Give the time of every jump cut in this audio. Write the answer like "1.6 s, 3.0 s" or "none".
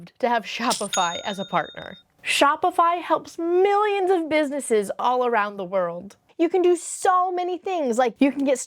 6.2 s